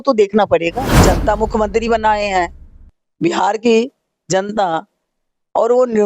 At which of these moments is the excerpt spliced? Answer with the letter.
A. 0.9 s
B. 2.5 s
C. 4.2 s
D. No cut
A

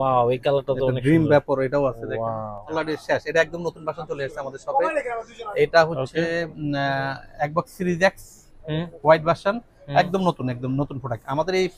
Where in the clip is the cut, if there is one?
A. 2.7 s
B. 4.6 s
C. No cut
A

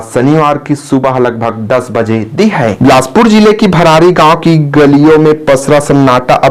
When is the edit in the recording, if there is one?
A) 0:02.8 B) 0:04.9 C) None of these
A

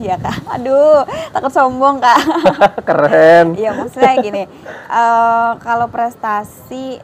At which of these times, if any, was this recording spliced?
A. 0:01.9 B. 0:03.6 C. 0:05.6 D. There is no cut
D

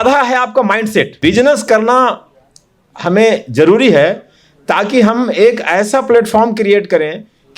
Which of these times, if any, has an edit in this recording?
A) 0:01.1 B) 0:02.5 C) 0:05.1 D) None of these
A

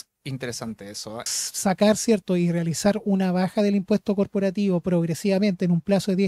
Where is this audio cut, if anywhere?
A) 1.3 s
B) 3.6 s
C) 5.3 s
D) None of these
A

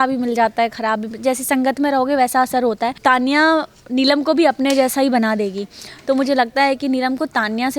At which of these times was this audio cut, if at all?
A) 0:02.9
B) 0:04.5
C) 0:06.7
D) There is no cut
A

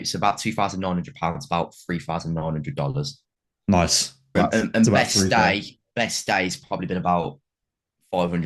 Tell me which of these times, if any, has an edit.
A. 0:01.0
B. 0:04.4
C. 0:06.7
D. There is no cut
B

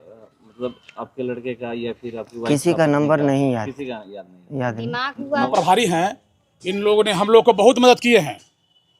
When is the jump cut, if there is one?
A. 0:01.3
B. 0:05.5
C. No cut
B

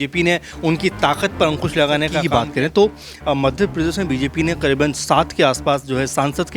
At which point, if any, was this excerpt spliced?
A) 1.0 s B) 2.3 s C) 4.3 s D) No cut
B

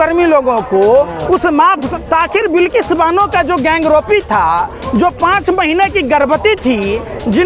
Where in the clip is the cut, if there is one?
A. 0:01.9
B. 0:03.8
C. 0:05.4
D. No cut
A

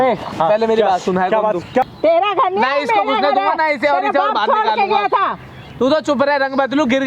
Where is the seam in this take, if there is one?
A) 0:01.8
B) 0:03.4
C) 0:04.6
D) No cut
A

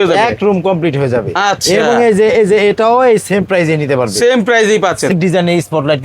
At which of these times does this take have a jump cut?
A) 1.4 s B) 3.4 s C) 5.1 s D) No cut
C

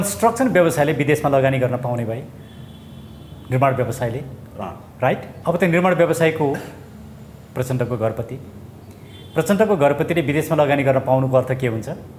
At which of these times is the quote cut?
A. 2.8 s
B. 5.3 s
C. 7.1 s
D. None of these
B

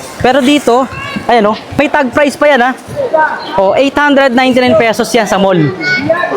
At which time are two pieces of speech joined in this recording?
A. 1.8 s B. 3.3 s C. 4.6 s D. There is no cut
A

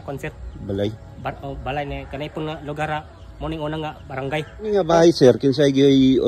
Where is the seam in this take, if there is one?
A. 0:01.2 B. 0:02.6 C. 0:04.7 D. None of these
C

